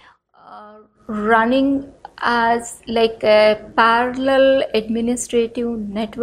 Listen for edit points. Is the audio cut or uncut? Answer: uncut